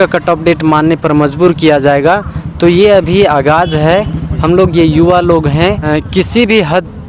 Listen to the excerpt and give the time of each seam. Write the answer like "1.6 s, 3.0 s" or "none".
5.9 s